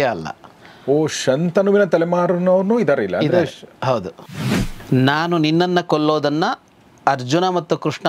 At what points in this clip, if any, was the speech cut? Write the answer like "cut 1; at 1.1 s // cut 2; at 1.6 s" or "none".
cut 1; at 4.3 s